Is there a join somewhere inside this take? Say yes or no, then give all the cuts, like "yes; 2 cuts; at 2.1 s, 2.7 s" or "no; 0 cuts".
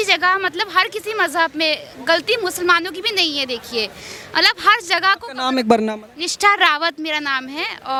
no; 0 cuts